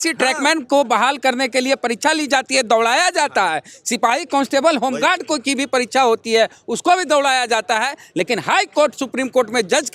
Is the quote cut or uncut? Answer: uncut